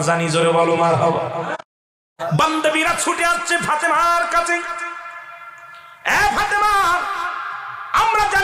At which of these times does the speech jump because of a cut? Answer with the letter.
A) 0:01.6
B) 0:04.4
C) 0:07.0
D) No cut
A